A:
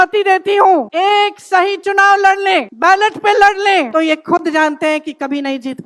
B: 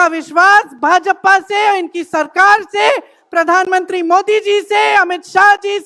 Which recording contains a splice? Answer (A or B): A